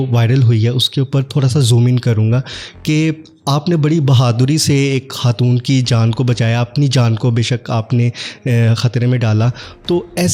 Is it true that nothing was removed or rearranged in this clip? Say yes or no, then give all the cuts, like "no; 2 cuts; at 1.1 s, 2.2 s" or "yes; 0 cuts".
yes; 0 cuts